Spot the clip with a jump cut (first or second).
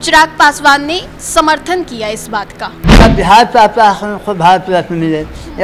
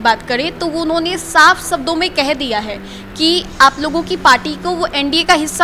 first